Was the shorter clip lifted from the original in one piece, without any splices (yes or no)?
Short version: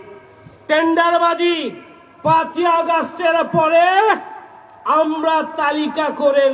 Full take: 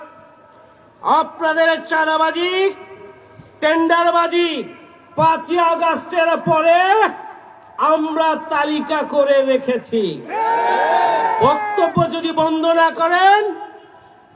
yes